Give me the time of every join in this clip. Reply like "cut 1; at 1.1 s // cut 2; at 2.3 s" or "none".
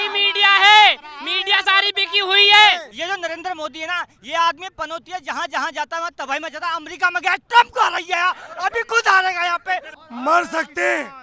cut 1; at 2.9 s // cut 2; at 10.0 s